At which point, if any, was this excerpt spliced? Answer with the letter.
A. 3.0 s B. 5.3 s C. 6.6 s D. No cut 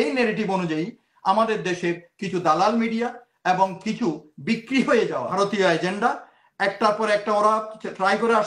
B